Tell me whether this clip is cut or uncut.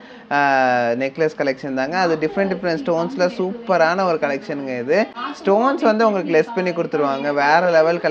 uncut